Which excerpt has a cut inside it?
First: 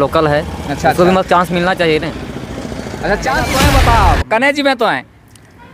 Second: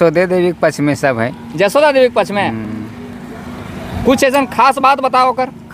first; 1 cut; at 3.5 s

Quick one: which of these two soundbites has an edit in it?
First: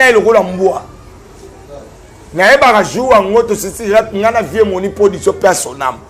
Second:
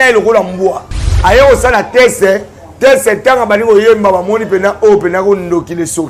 second; 1 cut; at 1.1 s

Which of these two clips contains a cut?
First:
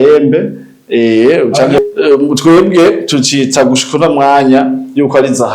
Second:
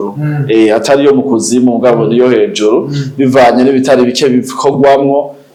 first; 1 cut; at 1.8 s

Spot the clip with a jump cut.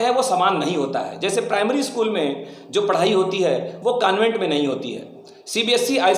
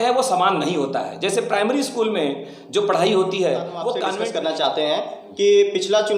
second; 1 cut; at 4.1 s

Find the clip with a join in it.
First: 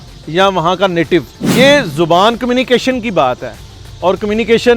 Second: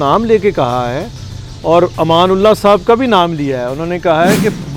first; 1 cut; at 1.4 s

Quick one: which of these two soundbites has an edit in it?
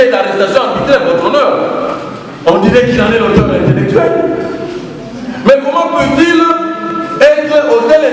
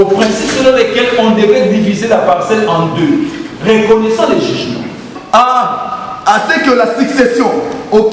second; 1 cut; at 5.1 s

